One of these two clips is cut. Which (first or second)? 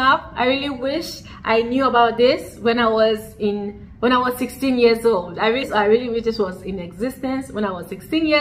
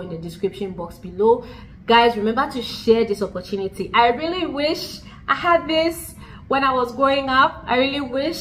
first